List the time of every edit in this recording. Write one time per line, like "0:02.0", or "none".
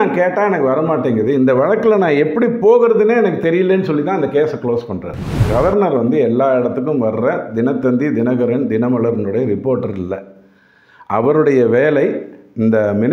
0:05.4